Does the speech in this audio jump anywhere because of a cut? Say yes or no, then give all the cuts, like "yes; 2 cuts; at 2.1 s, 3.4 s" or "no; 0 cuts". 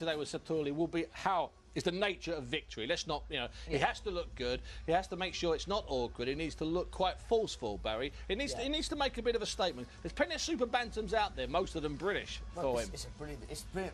yes; 1 cut; at 9.9 s